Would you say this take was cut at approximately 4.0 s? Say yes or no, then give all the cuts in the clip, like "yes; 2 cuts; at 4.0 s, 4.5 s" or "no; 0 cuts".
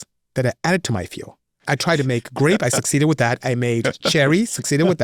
no; 1 cut; at 1.7 s